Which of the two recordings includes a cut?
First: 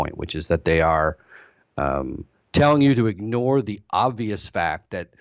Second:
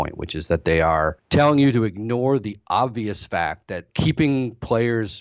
second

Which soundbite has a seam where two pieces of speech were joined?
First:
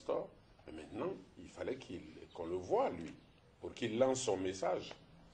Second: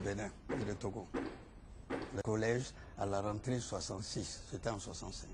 second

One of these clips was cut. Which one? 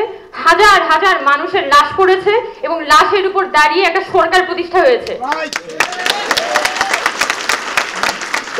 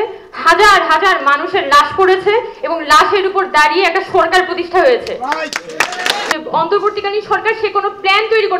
second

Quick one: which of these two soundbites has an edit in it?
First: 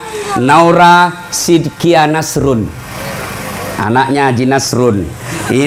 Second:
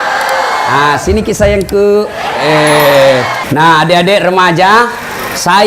second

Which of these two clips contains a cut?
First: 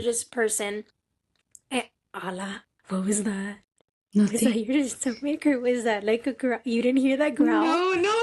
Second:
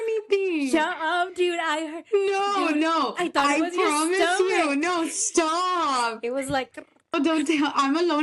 second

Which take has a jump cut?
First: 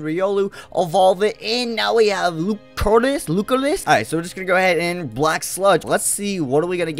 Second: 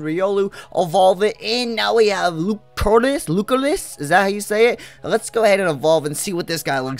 first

